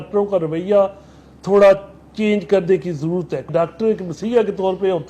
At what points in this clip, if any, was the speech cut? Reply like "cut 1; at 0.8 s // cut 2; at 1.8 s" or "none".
cut 1; at 3.5 s